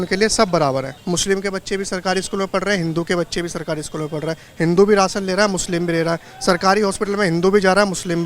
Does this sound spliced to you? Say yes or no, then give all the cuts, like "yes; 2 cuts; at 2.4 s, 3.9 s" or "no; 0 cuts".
yes; 1 cut; at 1.0 s